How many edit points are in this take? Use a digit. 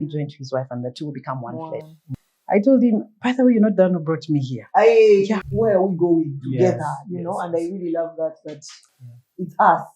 2